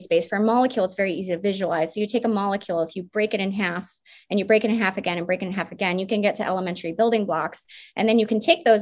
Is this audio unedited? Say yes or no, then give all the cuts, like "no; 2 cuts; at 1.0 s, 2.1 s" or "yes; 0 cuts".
yes; 0 cuts